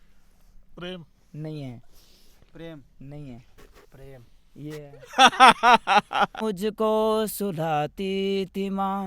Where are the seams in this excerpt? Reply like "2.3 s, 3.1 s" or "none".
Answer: 6.4 s